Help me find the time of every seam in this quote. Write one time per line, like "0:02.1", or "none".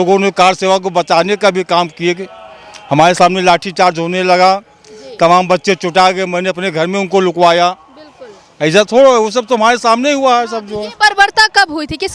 none